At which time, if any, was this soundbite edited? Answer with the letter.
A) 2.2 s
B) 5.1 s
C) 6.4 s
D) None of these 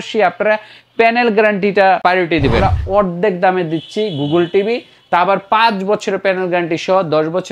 A